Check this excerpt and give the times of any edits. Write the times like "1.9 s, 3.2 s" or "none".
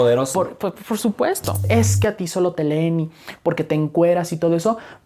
1.6 s